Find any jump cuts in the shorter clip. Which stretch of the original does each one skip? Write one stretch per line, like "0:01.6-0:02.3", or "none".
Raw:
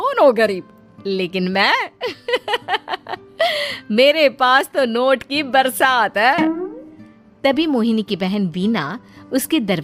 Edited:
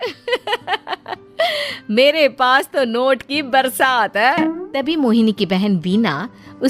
0:06.7-0:07.4